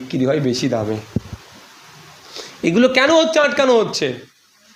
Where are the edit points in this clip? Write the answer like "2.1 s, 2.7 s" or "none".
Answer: none